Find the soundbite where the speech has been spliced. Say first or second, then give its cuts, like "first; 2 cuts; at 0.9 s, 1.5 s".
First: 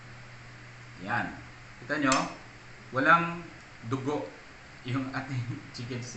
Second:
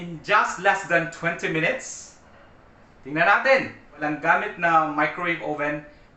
second; 1 cut; at 4.0 s